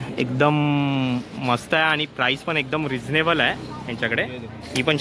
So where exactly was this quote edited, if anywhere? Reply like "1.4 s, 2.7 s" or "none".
none

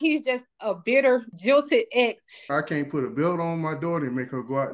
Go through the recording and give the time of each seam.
1.3 s, 2.5 s

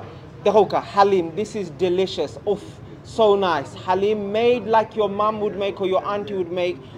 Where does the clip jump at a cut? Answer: none

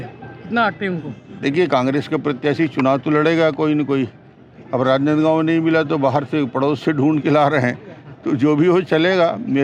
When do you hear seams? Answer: none

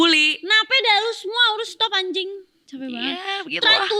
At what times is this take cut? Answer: none

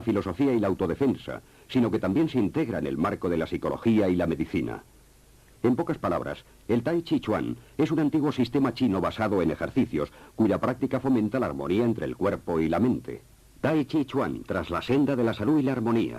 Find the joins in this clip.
6.0 s

